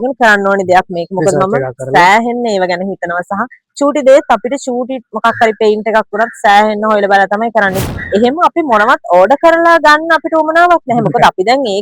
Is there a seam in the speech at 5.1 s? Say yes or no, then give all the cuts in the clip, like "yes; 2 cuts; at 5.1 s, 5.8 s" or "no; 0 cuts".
no; 1 cut; at 7.9 s